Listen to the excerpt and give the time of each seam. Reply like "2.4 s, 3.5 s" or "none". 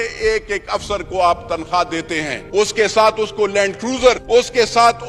2.4 s, 4.2 s